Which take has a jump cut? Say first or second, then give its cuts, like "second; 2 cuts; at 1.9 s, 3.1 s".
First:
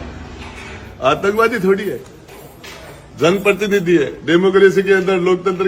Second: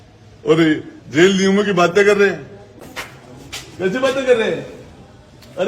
second; 1 cut; at 2.9 s